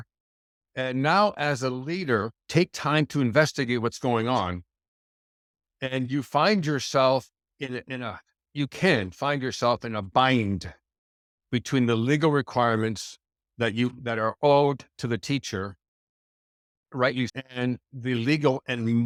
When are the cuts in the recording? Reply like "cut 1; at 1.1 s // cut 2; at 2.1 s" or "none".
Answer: none